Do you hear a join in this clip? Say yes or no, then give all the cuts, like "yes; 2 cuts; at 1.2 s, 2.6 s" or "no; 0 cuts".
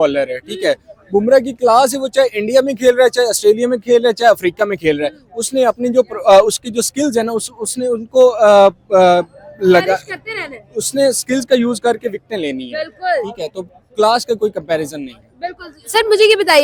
no; 0 cuts